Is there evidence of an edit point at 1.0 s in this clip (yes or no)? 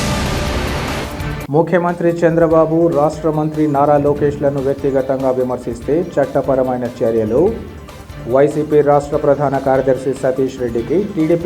yes